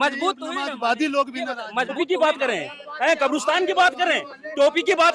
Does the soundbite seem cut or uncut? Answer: cut